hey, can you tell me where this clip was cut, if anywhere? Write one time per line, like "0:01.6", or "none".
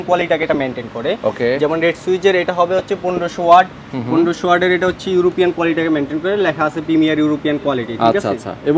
none